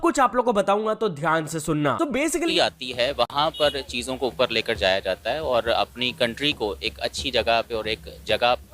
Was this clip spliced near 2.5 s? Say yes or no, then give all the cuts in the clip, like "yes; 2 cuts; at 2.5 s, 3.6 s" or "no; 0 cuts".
yes; 1 cut; at 2.5 s